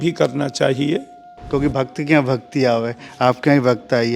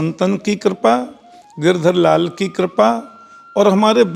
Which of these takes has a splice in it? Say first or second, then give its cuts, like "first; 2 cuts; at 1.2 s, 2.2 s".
first; 1 cut; at 1.4 s